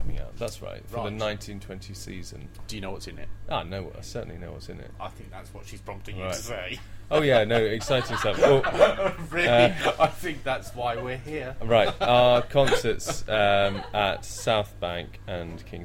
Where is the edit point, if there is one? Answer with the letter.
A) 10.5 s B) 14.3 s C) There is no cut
C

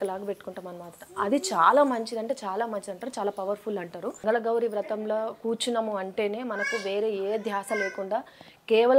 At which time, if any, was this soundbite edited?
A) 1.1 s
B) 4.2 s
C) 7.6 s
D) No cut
B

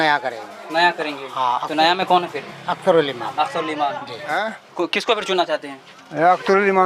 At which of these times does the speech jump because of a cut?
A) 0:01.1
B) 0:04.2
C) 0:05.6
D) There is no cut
B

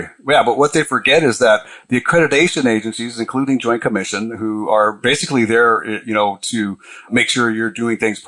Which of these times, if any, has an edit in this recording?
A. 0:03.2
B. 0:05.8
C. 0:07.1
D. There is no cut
C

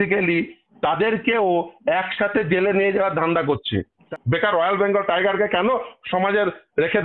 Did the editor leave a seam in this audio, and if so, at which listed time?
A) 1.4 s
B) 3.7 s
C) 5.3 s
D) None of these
B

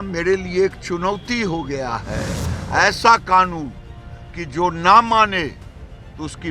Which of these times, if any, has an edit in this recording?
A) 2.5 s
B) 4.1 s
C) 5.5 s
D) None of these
A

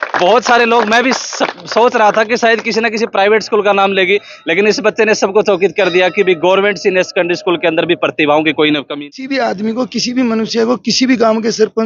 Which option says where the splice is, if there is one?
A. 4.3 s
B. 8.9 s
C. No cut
B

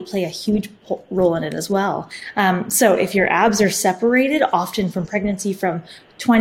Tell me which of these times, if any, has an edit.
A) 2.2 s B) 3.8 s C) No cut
A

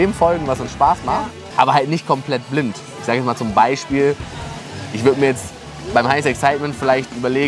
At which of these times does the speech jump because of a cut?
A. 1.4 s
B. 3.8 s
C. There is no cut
A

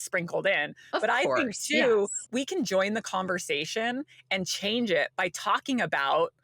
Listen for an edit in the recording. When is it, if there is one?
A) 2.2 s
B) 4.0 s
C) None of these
A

